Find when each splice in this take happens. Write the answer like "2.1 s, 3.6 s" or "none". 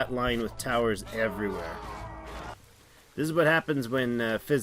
2.6 s